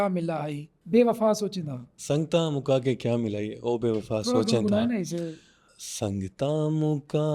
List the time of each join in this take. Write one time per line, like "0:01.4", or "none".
none

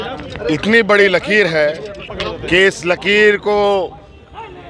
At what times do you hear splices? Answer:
0:02.1

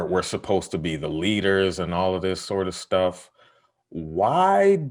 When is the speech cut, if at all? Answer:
none

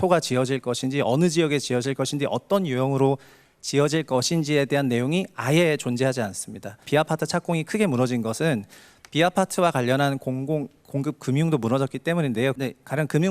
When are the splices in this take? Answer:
0:06.9
0:12.5

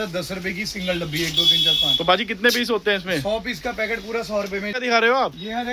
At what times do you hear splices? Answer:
0:04.7

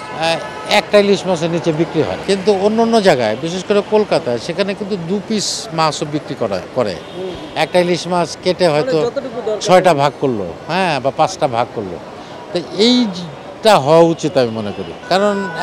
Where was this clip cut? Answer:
none

